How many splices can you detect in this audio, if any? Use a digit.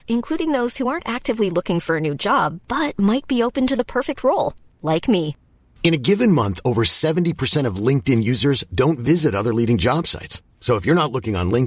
0